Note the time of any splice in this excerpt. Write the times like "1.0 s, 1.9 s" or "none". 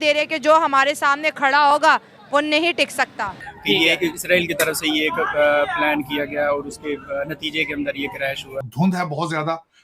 3.3 s, 8.7 s